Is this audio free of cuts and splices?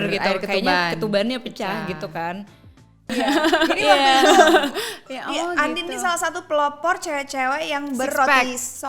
no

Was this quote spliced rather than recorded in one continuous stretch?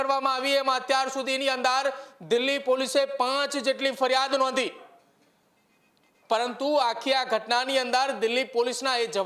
no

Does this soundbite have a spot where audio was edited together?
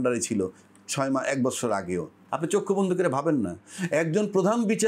yes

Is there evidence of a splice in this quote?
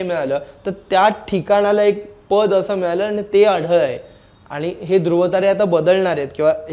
no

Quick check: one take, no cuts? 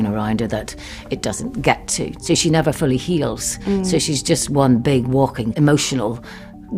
no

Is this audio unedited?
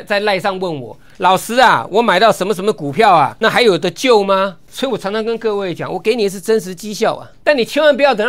no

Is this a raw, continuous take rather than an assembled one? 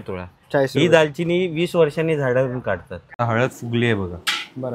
no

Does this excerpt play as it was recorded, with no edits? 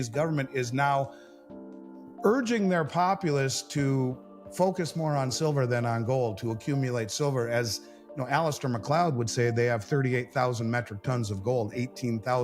yes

